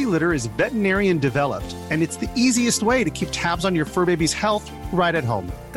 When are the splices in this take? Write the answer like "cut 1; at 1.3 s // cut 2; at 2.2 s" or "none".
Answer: none